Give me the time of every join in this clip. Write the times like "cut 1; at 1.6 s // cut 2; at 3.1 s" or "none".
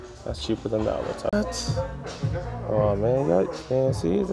cut 1; at 1.3 s